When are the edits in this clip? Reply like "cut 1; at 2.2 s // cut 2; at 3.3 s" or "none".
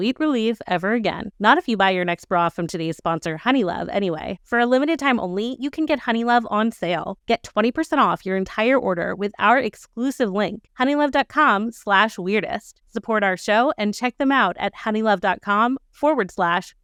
none

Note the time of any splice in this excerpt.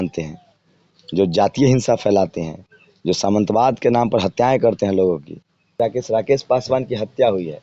cut 1; at 5.8 s

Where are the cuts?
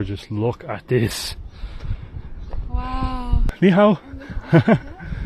cut 1; at 3.5 s

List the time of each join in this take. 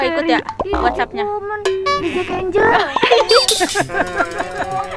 none

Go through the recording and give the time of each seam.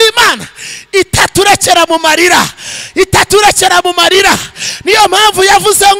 none

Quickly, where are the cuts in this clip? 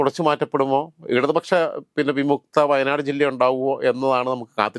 none

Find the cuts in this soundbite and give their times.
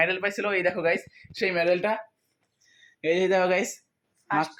none

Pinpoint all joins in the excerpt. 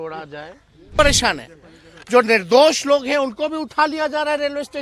cut 1; at 1.0 s

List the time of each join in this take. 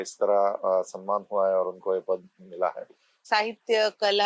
cut 1; at 3.2 s

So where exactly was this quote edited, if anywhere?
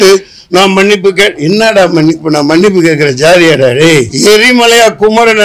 cut 1; at 4.1 s

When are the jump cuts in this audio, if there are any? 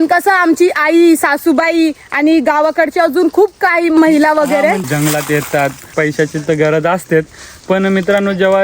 cut 1; at 4.0 s // cut 2; at 4.8 s // cut 3; at 6.0 s

